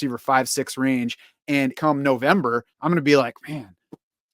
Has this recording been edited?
yes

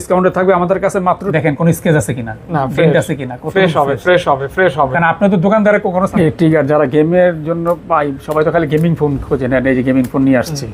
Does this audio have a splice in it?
yes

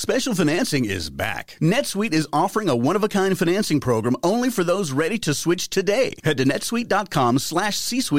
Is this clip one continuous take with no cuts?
yes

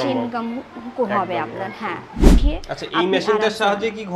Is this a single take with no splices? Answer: no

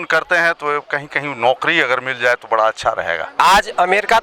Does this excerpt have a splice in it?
yes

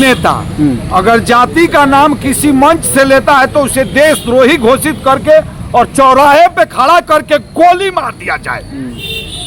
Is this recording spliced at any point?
no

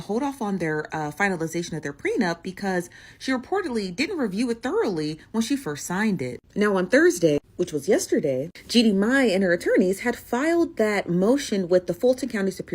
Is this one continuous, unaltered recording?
yes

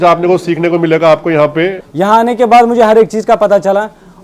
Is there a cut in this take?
yes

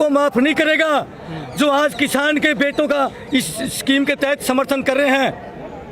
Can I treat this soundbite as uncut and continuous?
yes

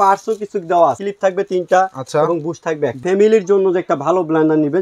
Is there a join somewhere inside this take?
yes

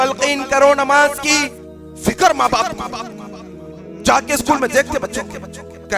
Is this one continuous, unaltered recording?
no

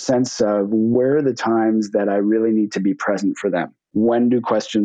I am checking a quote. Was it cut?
yes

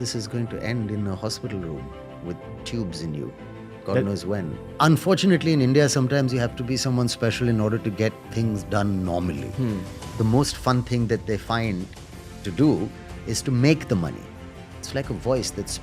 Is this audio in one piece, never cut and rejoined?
no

